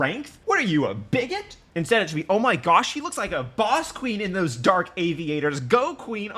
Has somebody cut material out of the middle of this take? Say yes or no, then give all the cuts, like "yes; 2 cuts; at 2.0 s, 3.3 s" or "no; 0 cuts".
yes; 1 cut; at 1.5 s